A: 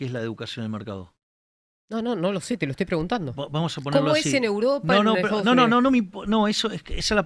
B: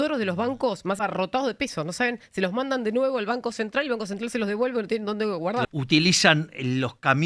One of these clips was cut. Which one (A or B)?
B